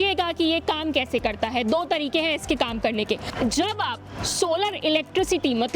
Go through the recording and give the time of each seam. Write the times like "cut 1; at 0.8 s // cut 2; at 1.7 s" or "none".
cut 1; at 3.3 s